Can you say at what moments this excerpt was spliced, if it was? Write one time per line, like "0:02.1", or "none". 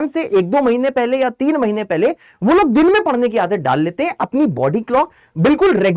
none